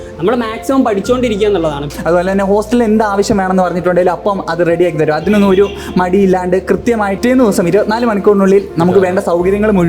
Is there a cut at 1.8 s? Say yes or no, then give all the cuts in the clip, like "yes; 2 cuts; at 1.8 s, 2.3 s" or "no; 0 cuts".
yes; 2 cuts; at 1.8 s, 7.2 s